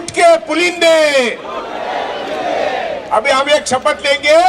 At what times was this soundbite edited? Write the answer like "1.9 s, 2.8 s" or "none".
none